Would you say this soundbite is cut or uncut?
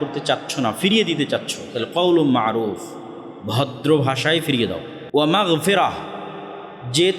cut